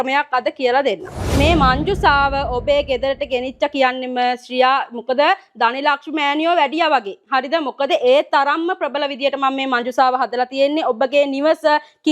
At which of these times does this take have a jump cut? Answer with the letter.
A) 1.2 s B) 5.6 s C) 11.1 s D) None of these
A